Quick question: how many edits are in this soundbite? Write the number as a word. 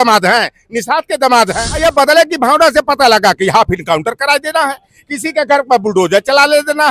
one